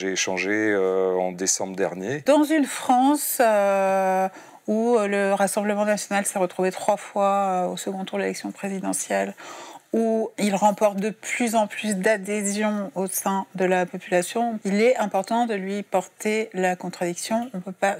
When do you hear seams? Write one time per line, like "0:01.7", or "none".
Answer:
0:02.2
0:10.3
0:14.6